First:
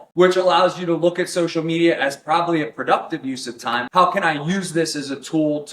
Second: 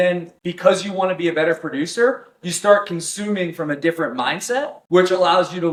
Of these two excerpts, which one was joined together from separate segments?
first; 1 cut; at 3.9 s

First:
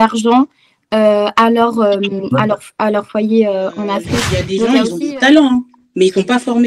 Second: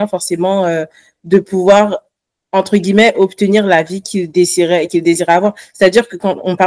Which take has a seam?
first; 1 cut; at 4.4 s

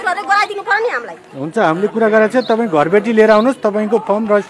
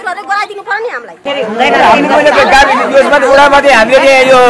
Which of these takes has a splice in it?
second; 1 cut; at 1.2 s

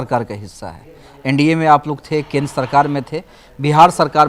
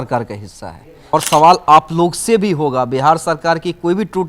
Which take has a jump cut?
second; 1 cut; at 1.1 s

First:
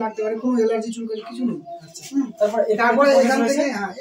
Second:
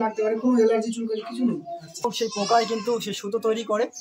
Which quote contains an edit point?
second; 1 cut; at 2.1 s

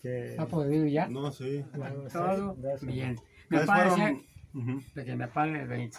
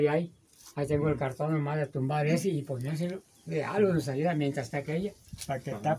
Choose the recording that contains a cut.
first; 1 cut; at 2.0 s

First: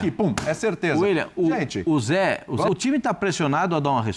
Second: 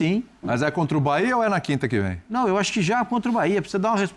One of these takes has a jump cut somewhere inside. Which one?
first; 1 cut; at 2.7 s

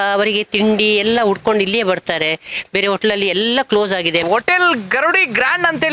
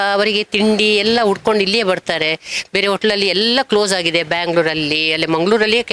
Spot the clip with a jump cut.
first; 1 cut; at 4.2 s

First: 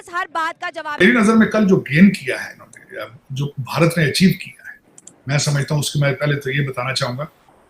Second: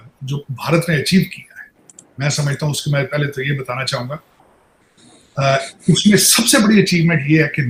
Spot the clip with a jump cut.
first; 1 cut; at 1.0 s

